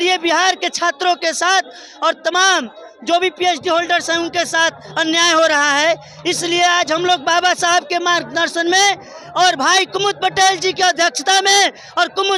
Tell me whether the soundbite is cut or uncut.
uncut